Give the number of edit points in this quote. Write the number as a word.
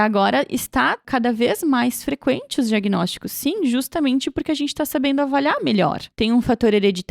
two